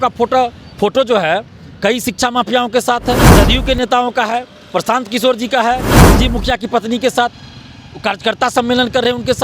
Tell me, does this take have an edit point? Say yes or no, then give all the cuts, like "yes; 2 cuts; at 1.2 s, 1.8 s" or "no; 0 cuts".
yes; 2 cuts; at 3.3 s, 5.9 s